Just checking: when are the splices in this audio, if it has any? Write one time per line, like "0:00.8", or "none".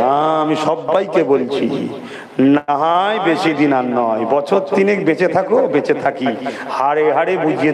none